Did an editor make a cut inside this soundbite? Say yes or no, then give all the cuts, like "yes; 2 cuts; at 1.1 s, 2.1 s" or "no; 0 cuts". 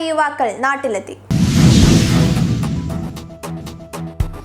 yes; 1 cut; at 1.2 s